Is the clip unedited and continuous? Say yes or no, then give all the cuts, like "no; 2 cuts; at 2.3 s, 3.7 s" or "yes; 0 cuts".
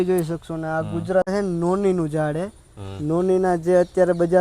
no; 1 cut; at 1.3 s